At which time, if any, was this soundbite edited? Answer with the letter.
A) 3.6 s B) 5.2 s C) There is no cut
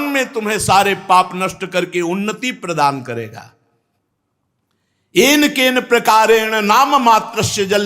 C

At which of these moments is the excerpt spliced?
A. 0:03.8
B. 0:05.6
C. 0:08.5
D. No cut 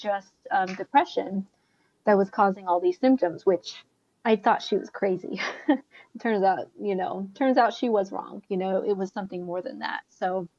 D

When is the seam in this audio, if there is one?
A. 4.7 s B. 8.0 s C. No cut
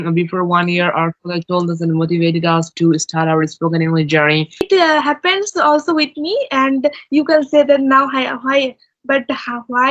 A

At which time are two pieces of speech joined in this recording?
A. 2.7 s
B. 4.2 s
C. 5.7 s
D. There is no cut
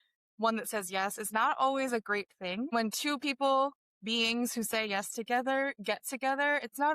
A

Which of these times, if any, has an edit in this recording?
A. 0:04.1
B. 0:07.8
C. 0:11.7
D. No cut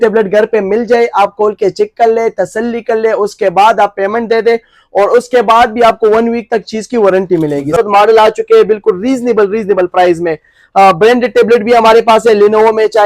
B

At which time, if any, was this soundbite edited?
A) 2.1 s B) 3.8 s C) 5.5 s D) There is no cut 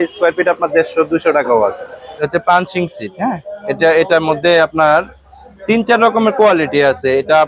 A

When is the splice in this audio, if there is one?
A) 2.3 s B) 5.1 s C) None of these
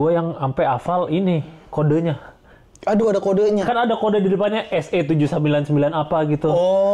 C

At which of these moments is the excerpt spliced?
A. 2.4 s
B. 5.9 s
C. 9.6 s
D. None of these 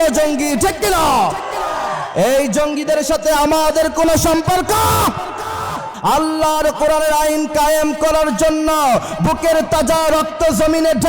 B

